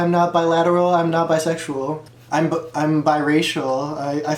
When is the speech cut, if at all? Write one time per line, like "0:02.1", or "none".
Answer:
none